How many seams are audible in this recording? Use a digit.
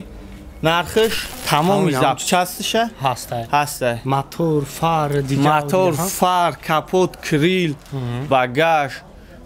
1